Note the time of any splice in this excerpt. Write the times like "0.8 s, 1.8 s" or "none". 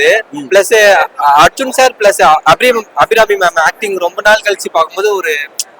none